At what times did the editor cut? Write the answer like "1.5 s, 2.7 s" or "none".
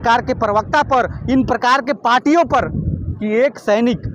3.1 s